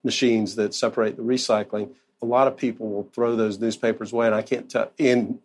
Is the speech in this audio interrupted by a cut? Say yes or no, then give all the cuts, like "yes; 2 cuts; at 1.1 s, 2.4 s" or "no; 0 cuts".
yes; 1 cut; at 2.1 s